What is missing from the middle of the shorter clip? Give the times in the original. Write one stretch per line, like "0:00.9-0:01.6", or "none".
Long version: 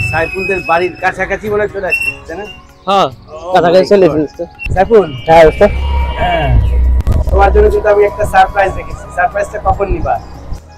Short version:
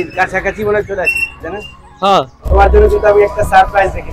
0:03.2-0:07.2